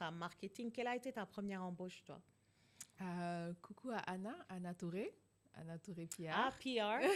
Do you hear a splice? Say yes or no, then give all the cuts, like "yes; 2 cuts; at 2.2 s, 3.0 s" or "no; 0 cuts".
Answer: no; 0 cuts